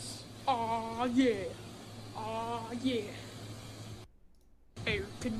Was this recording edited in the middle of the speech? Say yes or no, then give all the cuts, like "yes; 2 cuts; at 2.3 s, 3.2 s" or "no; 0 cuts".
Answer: no; 0 cuts